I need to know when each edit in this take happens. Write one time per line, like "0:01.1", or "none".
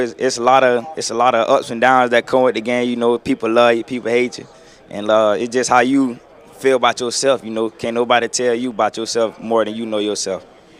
none